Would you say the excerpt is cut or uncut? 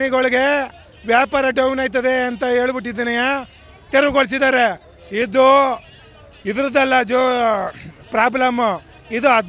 uncut